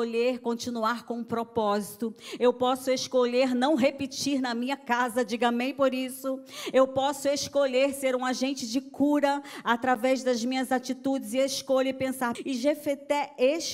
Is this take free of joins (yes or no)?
no